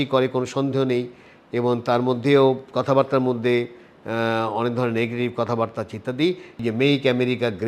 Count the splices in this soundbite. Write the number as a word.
one